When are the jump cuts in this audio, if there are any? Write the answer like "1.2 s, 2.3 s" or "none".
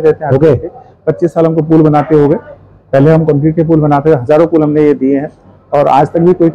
none